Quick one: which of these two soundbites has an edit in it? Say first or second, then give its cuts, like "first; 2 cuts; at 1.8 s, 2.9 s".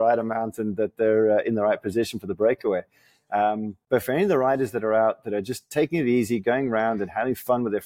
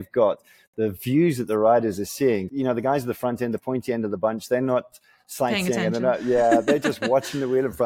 second; 1 cut; at 2.5 s